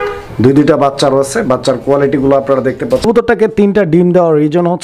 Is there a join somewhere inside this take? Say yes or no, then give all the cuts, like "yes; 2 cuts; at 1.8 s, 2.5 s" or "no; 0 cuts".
yes; 1 cut; at 3.1 s